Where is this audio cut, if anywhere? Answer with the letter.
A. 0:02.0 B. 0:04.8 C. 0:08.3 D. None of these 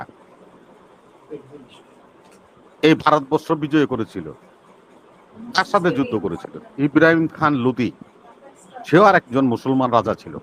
D